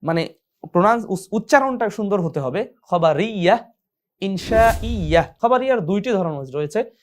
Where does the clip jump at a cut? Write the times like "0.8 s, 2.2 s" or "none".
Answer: 5.3 s